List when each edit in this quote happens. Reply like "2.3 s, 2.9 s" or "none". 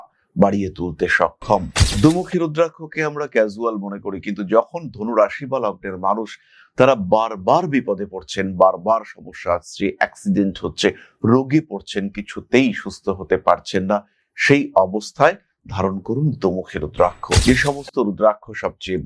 1.7 s